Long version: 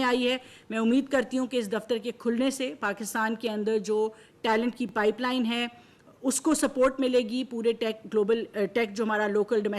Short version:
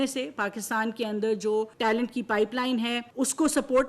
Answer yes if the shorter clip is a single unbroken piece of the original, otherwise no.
no